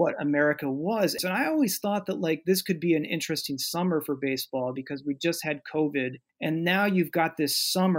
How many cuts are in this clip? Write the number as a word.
two